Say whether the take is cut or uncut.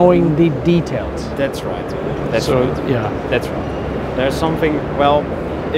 uncut